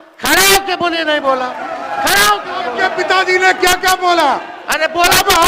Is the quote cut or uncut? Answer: cut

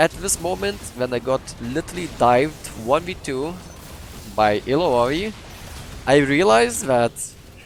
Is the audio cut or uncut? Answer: uncut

